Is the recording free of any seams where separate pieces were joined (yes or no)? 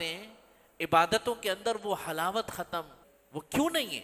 no